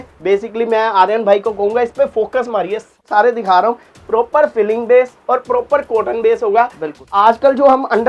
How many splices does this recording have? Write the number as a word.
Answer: two